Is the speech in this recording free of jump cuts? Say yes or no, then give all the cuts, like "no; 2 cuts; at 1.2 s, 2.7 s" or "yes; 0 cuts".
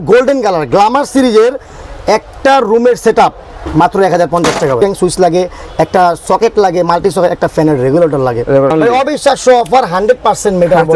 no; 2 cuts; at 4.8 s, 8.7 s